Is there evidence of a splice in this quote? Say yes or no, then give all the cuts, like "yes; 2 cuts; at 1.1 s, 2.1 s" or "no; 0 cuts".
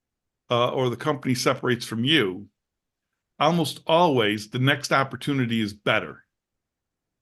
no; 0 cuts